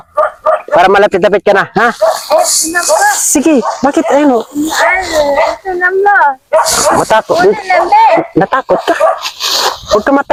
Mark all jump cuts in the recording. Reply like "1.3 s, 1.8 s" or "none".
none